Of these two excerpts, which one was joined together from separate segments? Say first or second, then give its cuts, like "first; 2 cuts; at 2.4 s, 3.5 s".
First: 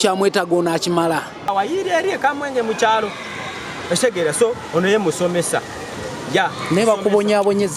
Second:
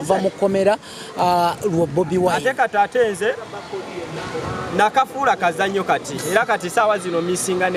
first; 1 cut; at 1.5 s